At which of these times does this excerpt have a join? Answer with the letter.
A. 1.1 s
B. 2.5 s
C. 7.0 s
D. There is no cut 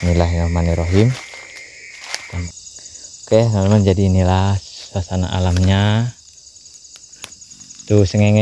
B